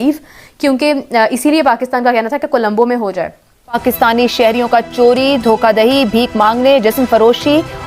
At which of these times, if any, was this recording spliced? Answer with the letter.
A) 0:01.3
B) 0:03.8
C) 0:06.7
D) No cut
B